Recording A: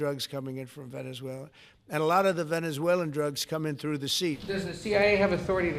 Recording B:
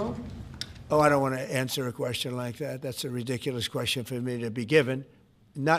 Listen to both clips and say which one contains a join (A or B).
A